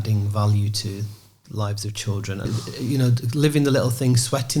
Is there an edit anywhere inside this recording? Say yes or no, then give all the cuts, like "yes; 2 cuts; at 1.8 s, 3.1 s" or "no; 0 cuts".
yes; 1 cut; at 2.6 s